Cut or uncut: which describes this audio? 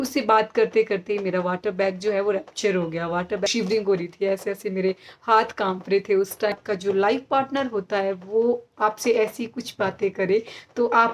cut